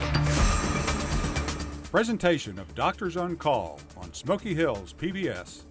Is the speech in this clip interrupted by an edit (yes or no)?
yes